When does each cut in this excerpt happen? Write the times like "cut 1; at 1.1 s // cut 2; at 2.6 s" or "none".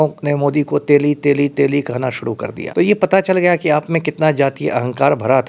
cut 1; at 2.6 s